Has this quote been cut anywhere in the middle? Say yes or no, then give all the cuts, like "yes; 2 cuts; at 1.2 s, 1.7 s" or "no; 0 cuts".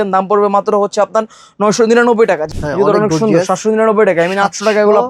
yes; 1 cut; at 2.5 s